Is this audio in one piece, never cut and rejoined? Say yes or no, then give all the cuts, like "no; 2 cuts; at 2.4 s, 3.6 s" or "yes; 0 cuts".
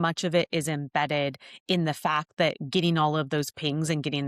yes; 0 cuts